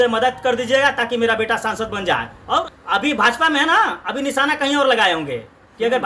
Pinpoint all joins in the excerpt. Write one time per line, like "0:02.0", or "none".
0:02.6